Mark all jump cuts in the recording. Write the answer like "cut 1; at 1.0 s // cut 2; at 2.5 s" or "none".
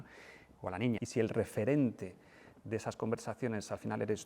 cut 1; at 1.0 s